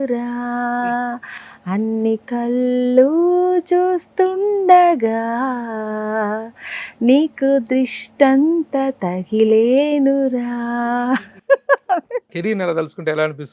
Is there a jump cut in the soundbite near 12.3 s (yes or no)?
yes